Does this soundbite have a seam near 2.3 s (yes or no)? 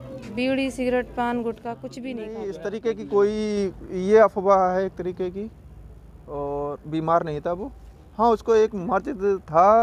yes